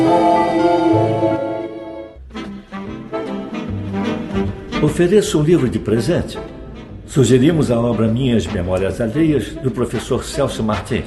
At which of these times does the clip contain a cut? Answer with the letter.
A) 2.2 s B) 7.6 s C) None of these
A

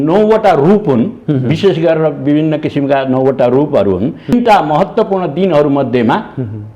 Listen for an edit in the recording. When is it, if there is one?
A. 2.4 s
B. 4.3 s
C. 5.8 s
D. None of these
B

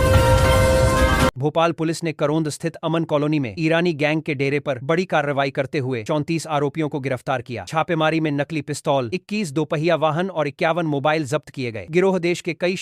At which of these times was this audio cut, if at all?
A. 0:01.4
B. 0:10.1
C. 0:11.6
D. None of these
A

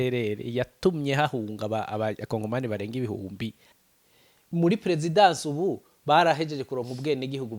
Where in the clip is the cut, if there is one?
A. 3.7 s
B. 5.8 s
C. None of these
A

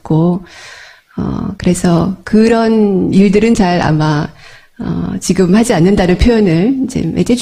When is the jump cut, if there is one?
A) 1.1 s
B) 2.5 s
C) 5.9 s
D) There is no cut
B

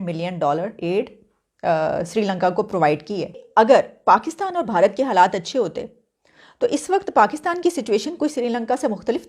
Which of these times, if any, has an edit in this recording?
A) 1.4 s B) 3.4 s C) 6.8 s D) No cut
B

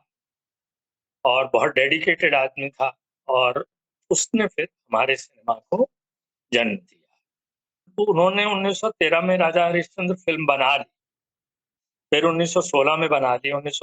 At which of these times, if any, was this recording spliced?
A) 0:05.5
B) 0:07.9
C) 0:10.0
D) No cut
B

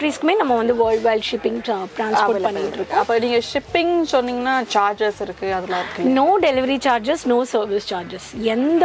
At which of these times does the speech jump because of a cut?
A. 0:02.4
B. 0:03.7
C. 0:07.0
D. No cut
D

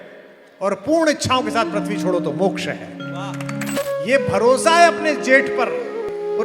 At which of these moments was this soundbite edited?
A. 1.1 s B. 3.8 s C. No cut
B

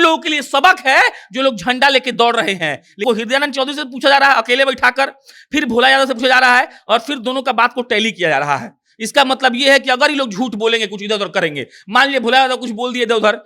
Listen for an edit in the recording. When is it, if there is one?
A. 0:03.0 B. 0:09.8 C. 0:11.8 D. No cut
A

